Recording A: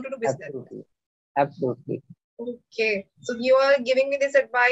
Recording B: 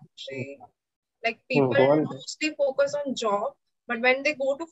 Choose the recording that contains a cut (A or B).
A